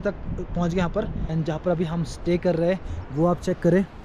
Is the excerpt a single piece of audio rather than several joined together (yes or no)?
no